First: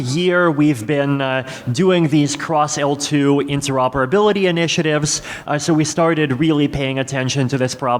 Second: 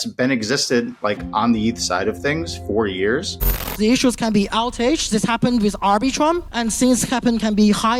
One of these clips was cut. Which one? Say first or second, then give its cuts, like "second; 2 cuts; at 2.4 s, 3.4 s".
second; 2 cuts; at 3.7 s, 6.5 s